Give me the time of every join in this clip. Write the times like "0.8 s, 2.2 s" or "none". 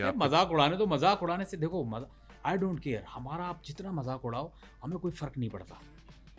none